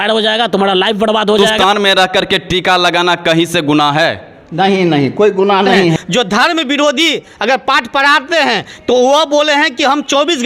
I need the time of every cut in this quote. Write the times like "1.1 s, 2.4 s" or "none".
1.5 s, 6.0 s